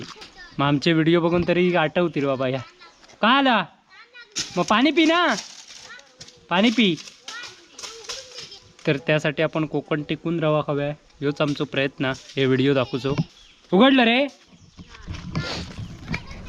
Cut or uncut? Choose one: uncut